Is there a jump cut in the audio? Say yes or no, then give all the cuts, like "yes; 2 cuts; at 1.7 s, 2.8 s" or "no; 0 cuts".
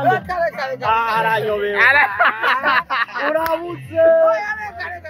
no; 0 cuts